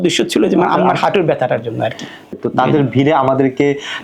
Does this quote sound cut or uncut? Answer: cut